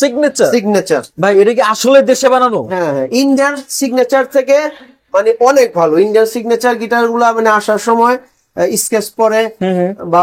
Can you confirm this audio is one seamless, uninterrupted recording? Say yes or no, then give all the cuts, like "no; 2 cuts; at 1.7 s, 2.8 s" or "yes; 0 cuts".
no; 1 cut; at 1.1 s